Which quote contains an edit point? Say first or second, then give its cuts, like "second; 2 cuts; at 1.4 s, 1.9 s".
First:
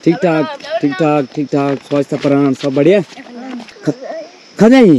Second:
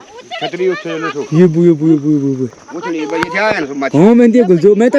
first; 1 cut; at 3.7 s